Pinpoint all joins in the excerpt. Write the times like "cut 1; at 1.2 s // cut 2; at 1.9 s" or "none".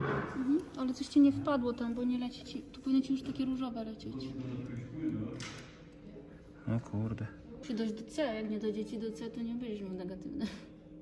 cut 1; at 7.6 s